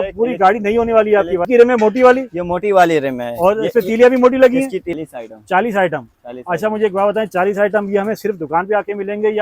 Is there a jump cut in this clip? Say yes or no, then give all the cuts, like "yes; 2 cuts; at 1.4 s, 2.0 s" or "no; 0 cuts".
yes; 2 cuts; at 1.5 s, 5.0 s